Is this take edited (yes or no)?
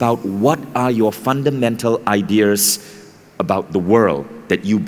no